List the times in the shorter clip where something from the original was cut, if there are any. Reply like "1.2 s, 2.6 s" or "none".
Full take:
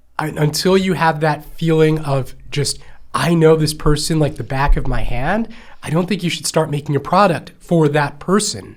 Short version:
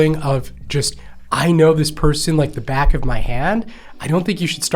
none